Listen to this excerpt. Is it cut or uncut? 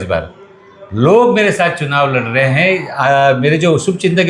uncut